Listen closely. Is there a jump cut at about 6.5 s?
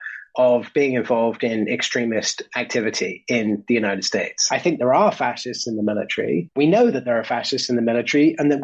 yes; 2 cuts; at 4.4 s, 6.5 s

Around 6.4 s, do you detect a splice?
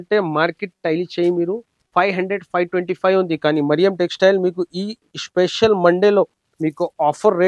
yes; 2 cuts; at 1.7 s, 6.4 s

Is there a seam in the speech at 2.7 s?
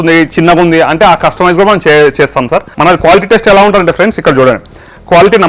yes; 1 cut; at 2.7 s

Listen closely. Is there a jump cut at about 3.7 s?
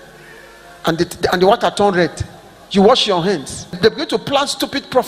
yes; 1 cut; at 3.7 s

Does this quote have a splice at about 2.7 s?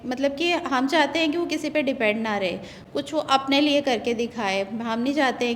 no; 0 cuts

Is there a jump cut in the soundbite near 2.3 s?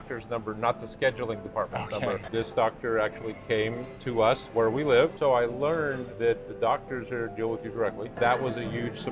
yes; 5 cuts; at 2.3 s, 4.4 s, 5.1 s, 6.1 s, 8.1 s

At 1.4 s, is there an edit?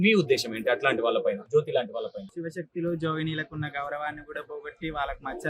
yes; 2 cuts; at 1.4 s, 2.3 s

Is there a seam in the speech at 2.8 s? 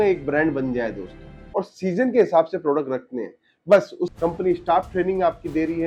no; 2 cuts; at 1.4 s, 4.1 s

